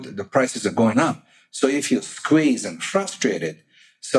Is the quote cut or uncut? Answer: uncut